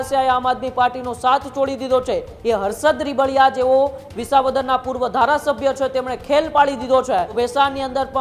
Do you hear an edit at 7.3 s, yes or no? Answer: yes